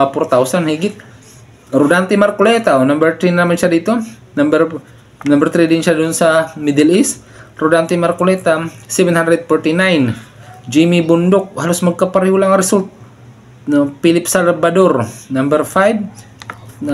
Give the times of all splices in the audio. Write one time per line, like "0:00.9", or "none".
none